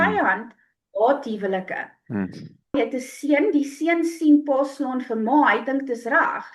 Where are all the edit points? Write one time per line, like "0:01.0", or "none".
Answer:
0:02.8